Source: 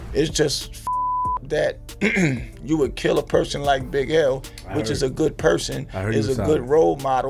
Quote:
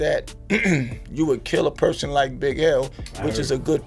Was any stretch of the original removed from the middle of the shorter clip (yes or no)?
no